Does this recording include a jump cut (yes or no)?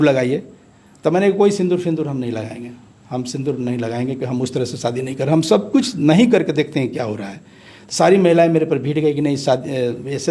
no